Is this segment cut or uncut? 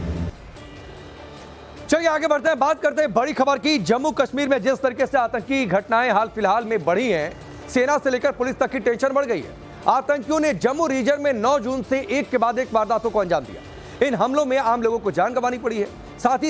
uncut